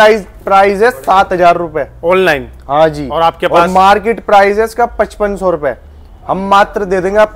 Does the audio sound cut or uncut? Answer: uncut